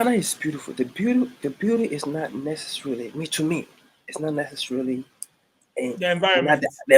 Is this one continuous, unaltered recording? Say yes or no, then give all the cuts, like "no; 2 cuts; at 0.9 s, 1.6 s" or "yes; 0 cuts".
yes; 0 cuts